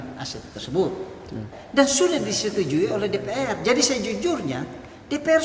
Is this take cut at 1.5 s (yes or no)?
yes